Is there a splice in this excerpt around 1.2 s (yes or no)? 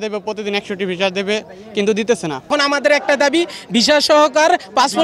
no